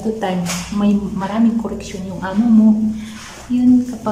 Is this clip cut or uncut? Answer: uncut